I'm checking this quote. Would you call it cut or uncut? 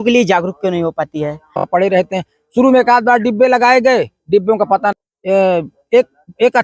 cut